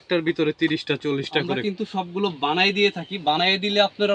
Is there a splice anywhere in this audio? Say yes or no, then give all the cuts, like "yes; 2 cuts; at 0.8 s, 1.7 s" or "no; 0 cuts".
yes; 1 cut; at 1.6 s